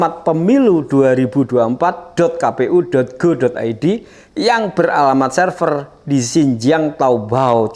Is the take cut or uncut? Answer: uncut